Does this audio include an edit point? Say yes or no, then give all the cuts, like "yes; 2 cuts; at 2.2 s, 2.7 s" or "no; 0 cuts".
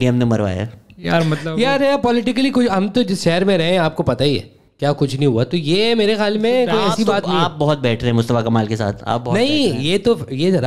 no; 0 cuts